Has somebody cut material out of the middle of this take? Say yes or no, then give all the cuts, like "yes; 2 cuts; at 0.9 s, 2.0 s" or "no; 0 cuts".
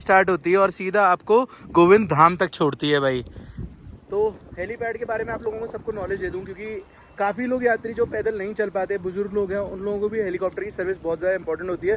no; 0 cuts